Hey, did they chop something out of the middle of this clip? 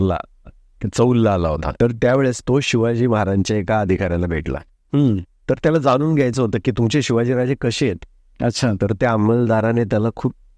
yes; 2 cuts; at 1.7 s, 6.7 s

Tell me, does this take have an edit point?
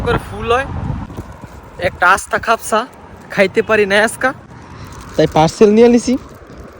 yes; 1 cut; at 1.0 s

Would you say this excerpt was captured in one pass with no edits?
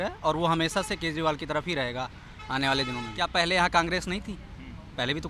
no; 1 cut; at 3.2 s

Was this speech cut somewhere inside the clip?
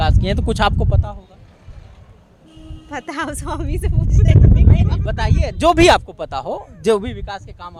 no; 0 cuts

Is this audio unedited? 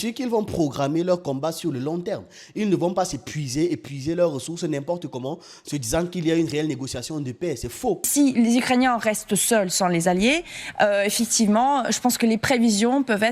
no; 1 cut; at 8.0 s

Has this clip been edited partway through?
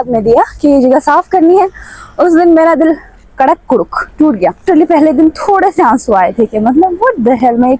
yes; 1 cut; at 4.6 s

